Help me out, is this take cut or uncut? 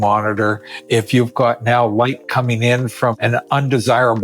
cut